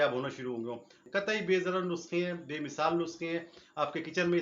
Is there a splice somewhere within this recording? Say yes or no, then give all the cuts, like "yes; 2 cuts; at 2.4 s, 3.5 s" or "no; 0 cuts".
yes; 1 cut; at 1.0 s